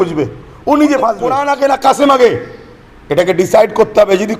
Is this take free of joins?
no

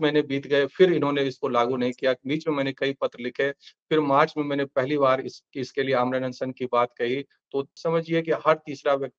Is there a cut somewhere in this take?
yes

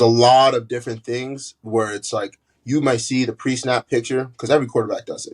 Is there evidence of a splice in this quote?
no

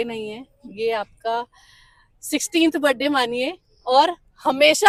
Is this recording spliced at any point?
no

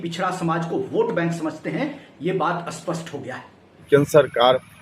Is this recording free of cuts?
no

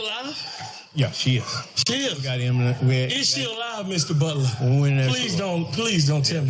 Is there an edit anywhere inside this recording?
no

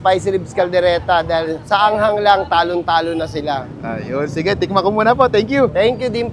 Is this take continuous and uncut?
yes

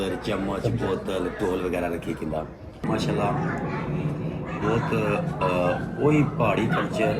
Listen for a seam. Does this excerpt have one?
yes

